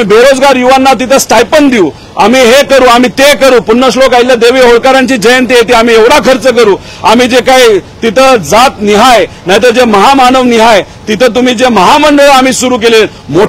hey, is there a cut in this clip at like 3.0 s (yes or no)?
no